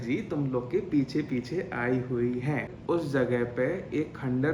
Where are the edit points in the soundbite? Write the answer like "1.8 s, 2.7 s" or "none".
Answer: 2.7 s